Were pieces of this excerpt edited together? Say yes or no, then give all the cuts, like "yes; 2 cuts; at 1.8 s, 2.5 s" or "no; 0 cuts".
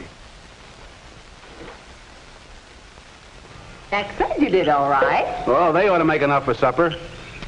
no; 0 cuts